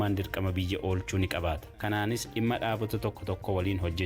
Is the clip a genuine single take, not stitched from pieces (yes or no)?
no